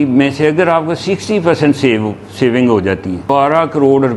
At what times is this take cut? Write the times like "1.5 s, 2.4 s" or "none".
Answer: 3.2 s